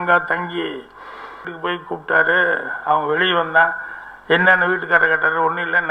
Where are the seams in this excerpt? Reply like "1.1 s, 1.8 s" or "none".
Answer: 1.5 s